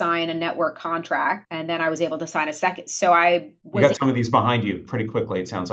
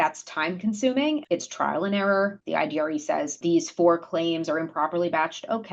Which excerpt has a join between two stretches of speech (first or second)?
second